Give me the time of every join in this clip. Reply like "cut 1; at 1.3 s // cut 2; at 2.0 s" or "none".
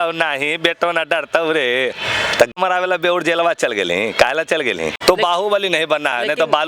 cut 1; at 2.5 s // cut 2; at 4.9 s